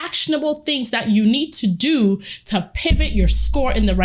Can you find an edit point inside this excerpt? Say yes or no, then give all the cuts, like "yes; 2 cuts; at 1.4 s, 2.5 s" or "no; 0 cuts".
no; 0 cuts